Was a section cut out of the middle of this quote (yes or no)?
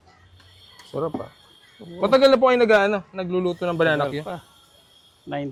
no